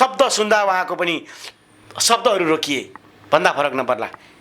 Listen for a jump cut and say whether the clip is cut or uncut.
uncut